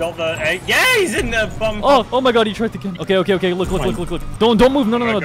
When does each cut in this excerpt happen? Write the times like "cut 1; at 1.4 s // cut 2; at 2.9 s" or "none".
cut 1; at 2.1 s